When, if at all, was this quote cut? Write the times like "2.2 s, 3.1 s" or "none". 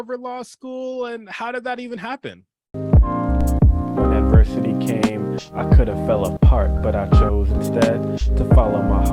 2.7 s